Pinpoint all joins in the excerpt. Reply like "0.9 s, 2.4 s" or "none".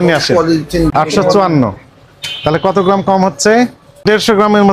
0.9 s, 4.0 s